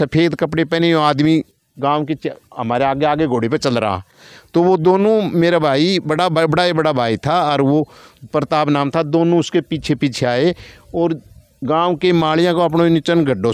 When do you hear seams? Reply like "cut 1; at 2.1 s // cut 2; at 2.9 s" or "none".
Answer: none